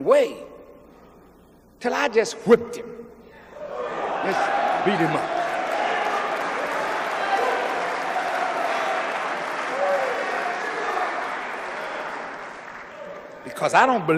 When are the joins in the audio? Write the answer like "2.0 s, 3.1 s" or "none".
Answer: 11.9 s